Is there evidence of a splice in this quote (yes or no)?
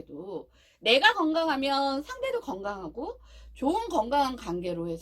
no